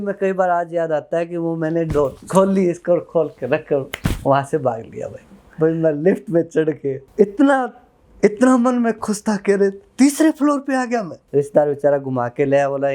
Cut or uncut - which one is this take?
cut